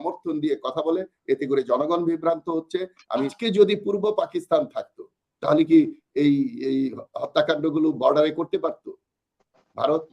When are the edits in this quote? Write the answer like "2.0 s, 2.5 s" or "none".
3.3 s